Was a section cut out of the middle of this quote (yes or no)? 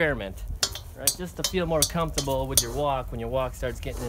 no